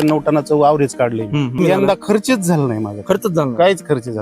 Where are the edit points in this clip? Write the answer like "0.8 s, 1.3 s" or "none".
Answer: 1.6 s

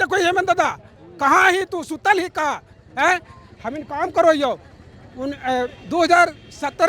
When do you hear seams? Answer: none

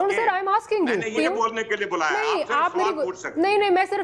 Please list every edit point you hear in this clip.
1.1 s

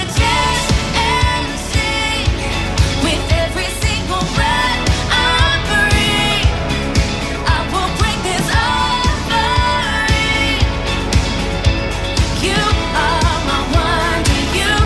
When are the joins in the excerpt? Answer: none

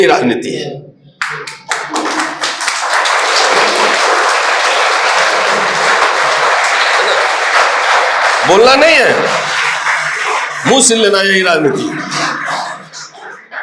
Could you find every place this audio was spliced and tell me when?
none

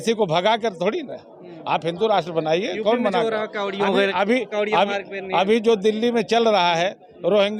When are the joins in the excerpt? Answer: none

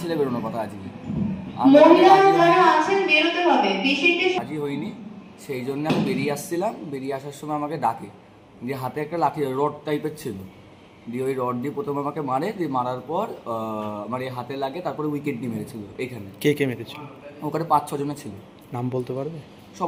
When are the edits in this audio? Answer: none

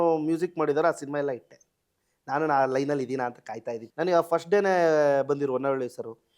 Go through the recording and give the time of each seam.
3.8 s

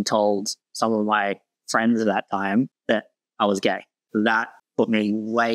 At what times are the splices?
3.9 s

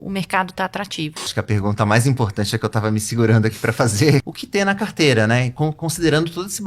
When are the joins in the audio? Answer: 1.3 s, 4.3 s

